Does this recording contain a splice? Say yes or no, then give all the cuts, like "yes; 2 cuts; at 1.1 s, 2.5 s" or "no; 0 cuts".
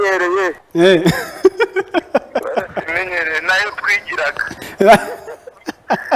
no; 0 cuts